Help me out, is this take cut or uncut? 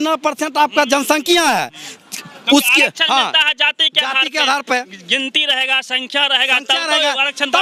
uncut